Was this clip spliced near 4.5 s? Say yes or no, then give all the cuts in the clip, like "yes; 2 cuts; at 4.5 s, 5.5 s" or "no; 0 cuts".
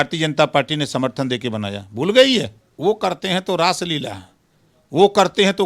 no; 1 cut; at 2.6 s